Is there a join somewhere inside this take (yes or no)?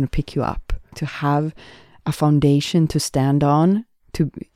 yes